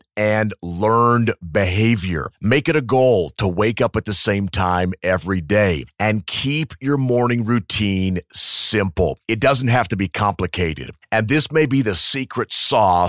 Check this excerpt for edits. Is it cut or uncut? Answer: uncut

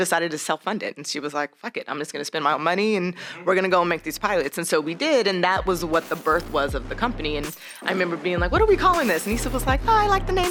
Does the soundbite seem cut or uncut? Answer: uncut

